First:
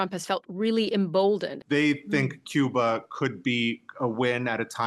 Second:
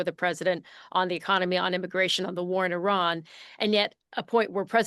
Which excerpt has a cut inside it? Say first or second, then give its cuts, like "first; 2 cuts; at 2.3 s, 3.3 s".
first; 1 cut; at 1.5 s